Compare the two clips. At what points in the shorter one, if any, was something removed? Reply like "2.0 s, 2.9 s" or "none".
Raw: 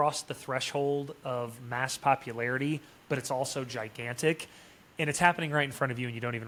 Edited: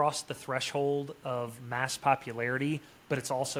none